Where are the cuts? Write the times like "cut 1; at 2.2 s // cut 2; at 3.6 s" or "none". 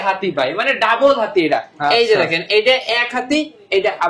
none